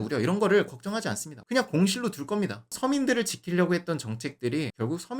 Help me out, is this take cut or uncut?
cut